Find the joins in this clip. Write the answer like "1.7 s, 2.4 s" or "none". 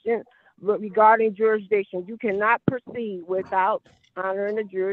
none